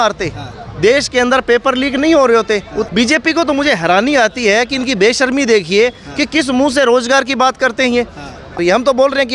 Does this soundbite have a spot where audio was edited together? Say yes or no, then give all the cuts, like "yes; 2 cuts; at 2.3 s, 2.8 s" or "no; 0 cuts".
yes; 2 cuts; at 2.9 s, 8.6 s